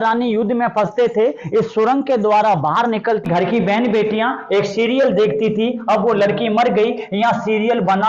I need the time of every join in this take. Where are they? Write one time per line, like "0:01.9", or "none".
0:03.2